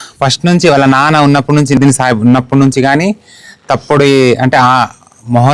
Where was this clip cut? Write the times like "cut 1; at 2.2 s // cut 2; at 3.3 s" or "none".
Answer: cut 1; at 1.8 s

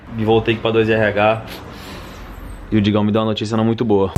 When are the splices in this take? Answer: none

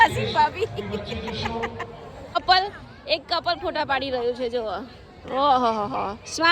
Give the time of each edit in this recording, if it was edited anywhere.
cut 1; at 2.4 s

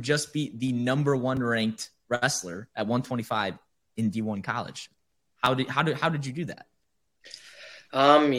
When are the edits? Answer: none

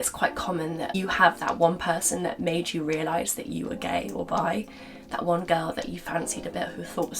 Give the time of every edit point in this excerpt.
cut 1; at 0.9 s

